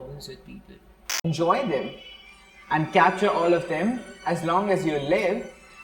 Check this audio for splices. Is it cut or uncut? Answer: cut